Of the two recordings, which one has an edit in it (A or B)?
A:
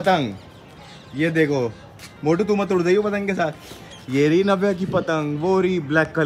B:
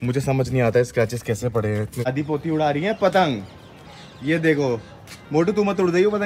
B